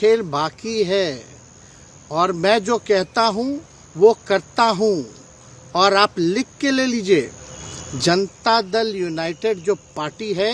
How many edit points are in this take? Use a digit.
0